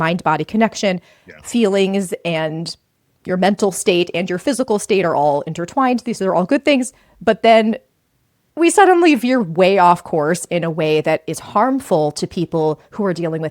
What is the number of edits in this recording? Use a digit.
0